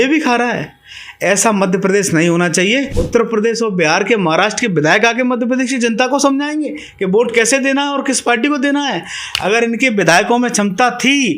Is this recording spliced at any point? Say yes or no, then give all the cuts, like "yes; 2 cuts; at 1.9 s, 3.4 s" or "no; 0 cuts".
yes; 1 cut; at 3.0 s